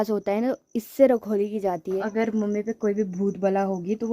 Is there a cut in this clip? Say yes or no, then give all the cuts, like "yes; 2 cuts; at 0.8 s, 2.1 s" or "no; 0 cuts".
yes; 1 cut; at 2.0 s